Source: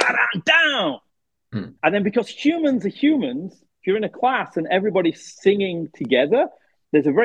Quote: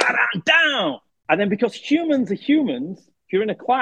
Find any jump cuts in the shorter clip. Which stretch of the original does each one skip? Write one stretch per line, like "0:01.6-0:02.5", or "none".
0:01.1-0:01.7